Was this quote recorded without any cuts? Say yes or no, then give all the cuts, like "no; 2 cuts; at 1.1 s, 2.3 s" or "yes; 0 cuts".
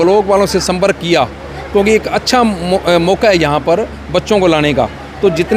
yes; 0 cuts